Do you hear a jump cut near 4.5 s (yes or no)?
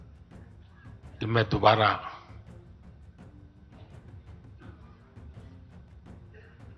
no